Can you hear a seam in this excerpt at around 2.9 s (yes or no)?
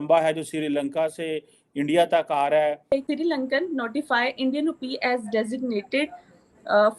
yes